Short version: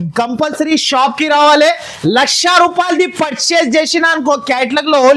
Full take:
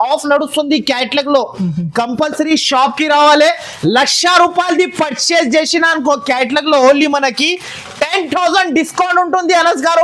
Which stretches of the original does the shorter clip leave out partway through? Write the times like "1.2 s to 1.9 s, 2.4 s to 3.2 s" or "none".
none